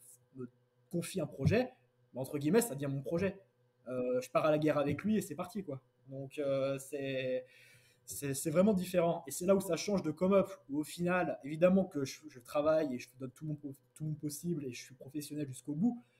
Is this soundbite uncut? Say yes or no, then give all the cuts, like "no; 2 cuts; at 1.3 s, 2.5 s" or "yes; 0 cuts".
yes; 0 cuts